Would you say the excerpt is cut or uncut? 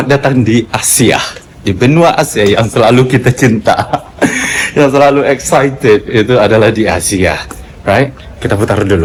uncut